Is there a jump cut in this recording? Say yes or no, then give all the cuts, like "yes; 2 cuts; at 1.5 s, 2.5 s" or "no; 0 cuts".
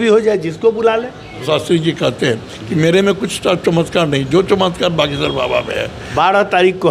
yes; 2 cuts; at 1.4 s, 6.0 s